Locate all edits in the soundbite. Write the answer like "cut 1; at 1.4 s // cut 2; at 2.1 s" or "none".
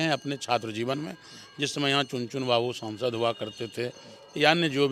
none